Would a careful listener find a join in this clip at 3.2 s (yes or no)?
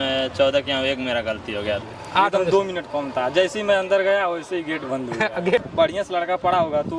no